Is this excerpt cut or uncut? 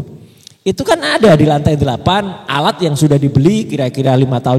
uncut